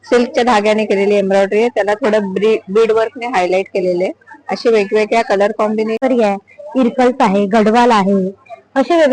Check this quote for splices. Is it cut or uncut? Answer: cut